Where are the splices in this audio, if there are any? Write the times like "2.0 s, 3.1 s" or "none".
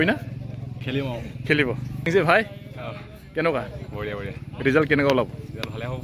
2.1 s